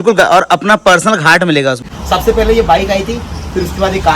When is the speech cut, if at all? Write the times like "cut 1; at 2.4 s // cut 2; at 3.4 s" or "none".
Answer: cut 1; at 1.9 s